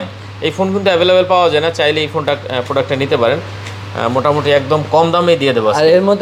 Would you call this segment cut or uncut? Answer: uncut